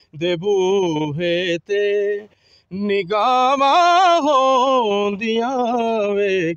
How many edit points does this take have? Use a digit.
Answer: 0